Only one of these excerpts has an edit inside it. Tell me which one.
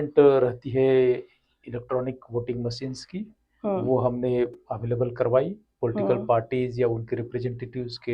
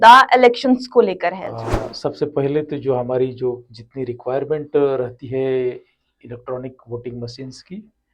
second; 1 cut; at 1.5 s

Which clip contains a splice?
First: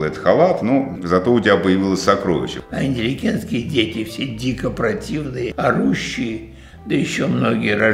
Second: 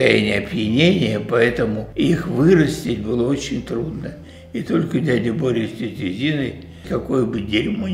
first; 2 cuts; at 1.0 s, 2.6 s

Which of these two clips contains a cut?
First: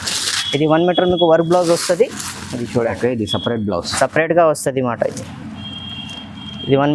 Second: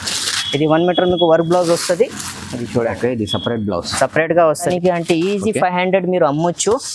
second; 1 cut; at 4.7 s

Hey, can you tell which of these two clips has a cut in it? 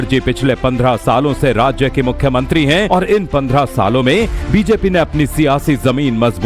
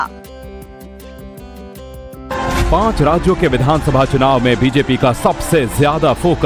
first; 1 cut; at 2.9 s

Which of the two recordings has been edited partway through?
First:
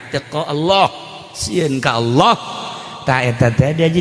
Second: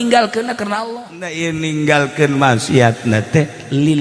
second; 1 cut; at 1.3 s

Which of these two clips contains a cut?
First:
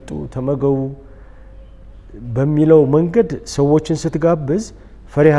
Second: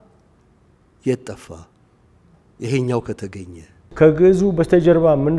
second; 1 cut; at 3.9 s

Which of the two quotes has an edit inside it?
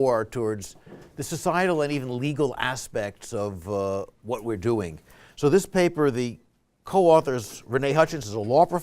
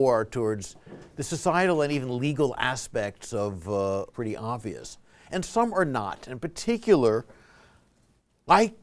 first; 1 cut; at 4.1 s

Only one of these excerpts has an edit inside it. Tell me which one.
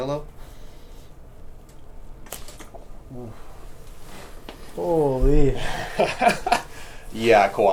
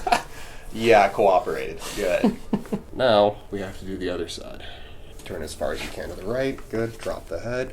second; 2 cuts; at 2.9 s, 5.1 s

